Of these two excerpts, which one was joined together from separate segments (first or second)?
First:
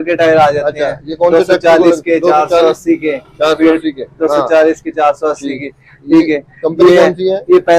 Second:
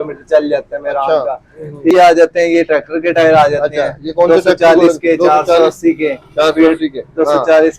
second